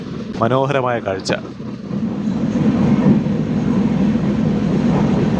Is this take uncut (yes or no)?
yes